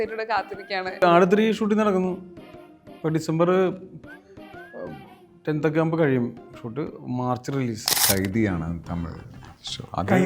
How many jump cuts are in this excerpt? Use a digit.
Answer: 2